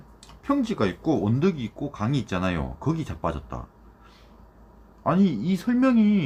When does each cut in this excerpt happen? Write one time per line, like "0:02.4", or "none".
none